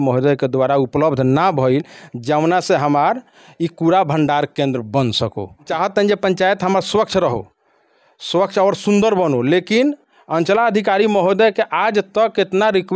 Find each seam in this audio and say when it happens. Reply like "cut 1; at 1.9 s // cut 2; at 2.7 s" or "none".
cut 1; at 5.7 s